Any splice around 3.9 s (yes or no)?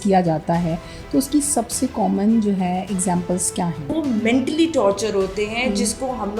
yes